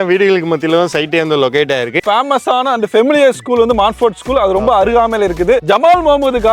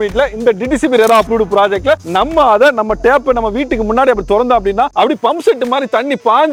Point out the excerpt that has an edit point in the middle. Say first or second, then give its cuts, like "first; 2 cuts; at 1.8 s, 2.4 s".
first; 2 cuts; at 2.0 s, 5.6 s